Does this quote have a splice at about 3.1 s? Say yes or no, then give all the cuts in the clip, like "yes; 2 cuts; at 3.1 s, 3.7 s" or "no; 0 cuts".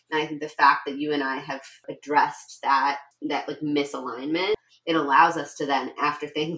yes; 3 cuts; at 1.9 s, 3.1 s, 4.7 s